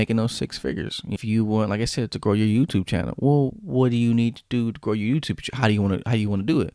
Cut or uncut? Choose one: cut